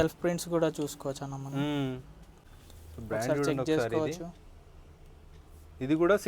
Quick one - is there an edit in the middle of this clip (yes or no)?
yes